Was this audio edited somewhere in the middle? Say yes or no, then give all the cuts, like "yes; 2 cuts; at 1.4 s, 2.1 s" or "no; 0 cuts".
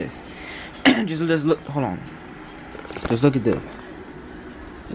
no; 0 cuts